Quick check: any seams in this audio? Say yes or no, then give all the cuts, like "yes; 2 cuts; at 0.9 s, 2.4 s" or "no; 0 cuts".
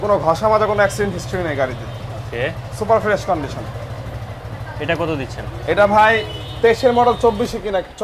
no; 0 cuts